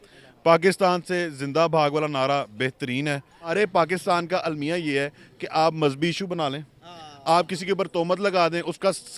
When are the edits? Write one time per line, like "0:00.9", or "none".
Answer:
0:03.5